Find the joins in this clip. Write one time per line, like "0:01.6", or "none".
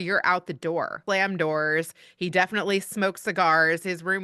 0:01.0